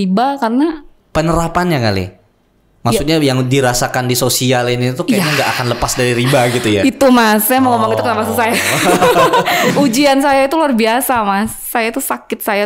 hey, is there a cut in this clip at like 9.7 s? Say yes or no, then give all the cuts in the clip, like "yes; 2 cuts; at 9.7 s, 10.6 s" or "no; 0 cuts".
yes; 1 cut; at 9.7 s